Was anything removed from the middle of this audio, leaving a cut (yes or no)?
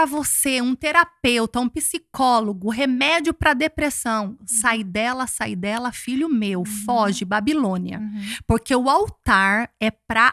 no